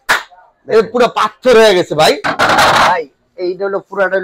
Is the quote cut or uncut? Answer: uncut